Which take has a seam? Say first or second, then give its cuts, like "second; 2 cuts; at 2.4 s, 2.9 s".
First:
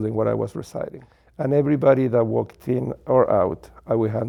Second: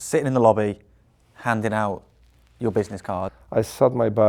second; 1 cut; at 3.4 s